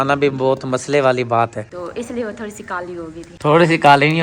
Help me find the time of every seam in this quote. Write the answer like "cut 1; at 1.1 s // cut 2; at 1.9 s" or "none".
cut 1; at 1.6 s // cut 2; at 3.2 s

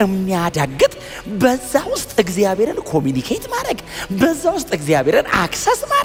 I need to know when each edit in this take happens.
none

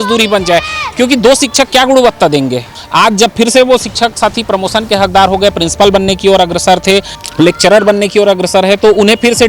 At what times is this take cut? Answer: cut 1; at 2.8 s // cut 2; at 7.2 s

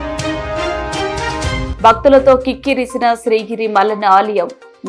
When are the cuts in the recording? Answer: none

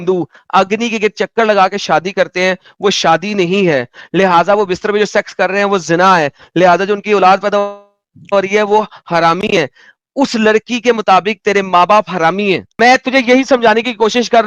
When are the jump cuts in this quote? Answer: none

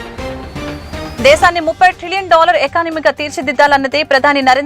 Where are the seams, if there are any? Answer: cut 1; at 1.1 s

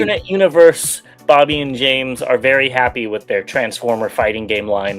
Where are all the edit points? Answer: none

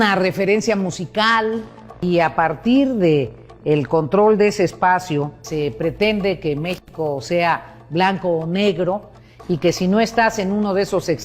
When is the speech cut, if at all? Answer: cut 1; at 2.0 s // cut 2; at 5.4 s

